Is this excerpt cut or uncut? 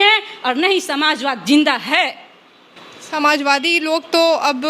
uncut